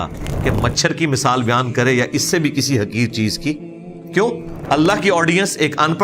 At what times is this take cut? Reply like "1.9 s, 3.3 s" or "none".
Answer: 4.5 s